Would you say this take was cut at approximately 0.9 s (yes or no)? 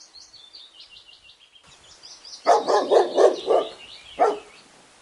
yes